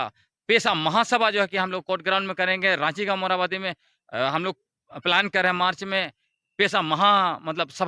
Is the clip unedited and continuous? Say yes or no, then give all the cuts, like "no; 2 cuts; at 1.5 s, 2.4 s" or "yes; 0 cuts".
yes; 0 cuts